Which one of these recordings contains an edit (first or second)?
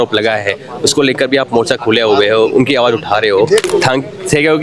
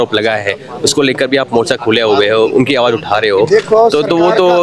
first